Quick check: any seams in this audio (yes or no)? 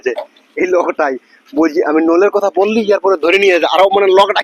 no